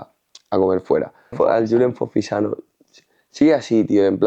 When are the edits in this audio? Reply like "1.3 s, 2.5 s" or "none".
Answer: 1.3 s